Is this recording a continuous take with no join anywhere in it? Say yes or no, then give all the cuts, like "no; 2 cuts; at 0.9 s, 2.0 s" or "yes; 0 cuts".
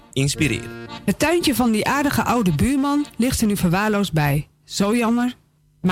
no; 1 cut; at 1.0 s